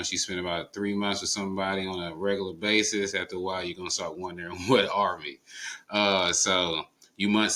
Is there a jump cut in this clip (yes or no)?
no